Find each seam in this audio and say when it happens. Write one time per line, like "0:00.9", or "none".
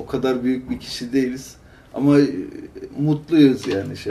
none